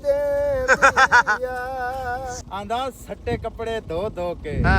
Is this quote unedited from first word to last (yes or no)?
no